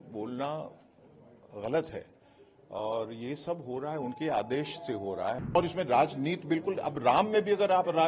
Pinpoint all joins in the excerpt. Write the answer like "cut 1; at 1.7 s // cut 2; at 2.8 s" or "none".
cut 1; at 5.5 s